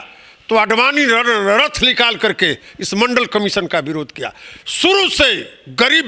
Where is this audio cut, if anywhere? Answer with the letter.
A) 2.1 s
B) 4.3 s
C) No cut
C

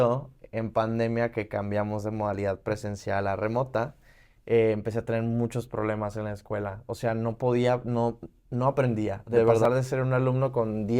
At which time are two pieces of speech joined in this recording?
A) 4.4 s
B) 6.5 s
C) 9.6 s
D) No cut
C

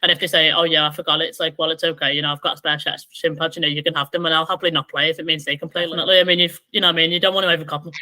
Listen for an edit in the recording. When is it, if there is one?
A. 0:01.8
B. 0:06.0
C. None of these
B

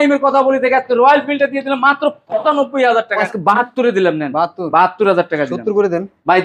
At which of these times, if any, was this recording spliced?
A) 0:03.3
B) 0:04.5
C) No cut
A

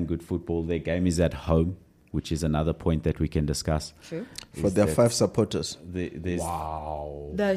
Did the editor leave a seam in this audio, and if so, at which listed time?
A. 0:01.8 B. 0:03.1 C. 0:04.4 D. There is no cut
D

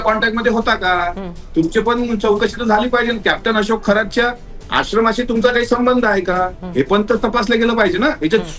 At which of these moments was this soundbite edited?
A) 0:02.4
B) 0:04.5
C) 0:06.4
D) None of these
D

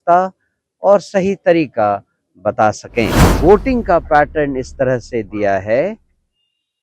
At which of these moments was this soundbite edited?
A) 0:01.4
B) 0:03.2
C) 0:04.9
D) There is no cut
B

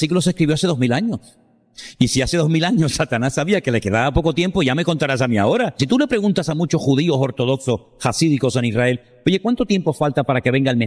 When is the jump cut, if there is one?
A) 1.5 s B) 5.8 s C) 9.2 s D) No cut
B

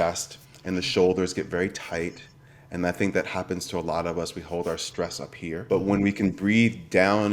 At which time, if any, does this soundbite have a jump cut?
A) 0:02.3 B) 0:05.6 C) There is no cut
B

